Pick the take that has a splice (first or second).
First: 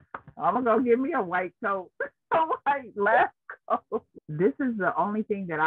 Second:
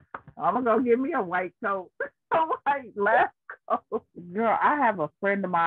first